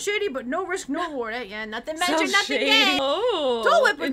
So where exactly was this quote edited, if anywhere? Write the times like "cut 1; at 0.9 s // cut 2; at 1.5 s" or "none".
cut 1; at 3.0 s